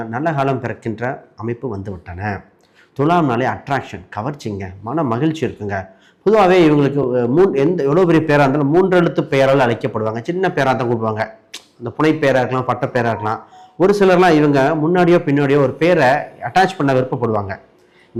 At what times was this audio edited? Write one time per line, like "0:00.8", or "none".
none